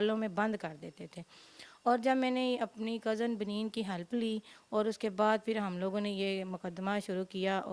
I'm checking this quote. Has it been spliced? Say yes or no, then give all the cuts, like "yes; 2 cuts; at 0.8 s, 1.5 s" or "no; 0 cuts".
no; 0 cuts